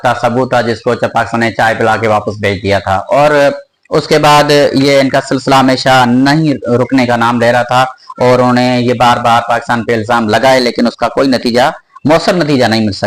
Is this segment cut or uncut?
uncut